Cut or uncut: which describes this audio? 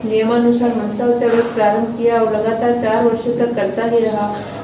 uncut